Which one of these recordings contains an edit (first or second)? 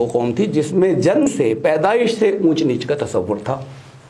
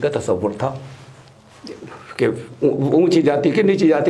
first